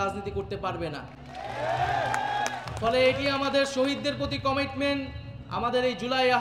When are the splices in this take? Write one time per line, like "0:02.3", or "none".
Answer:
none